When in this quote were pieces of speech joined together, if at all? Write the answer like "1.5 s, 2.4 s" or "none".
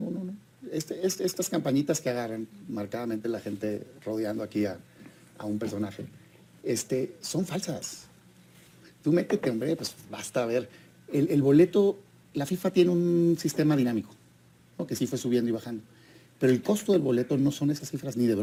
none

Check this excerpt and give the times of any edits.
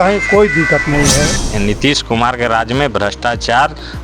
1.5 s

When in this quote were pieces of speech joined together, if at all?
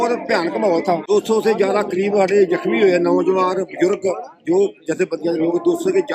1.1 s

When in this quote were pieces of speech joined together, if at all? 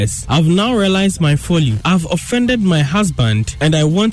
none

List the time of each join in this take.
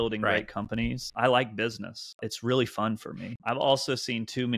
1.1 s, 2.3 s, 3.3 s

